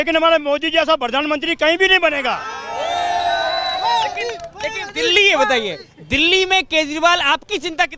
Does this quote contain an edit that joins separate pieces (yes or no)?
no